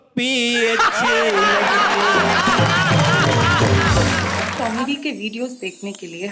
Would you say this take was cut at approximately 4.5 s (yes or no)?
yes